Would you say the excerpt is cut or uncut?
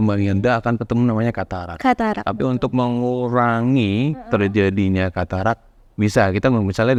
uncut